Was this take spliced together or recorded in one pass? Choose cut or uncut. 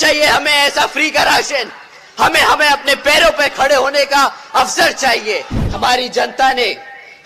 cut